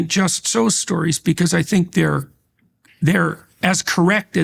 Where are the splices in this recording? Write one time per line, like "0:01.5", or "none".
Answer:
none